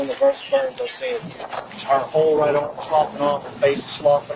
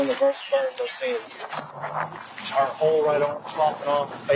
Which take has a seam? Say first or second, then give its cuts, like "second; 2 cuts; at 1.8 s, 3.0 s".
first; 1 cut; at 1.6 s